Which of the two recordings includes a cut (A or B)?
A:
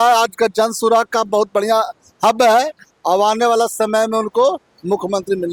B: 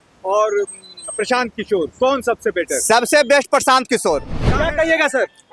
B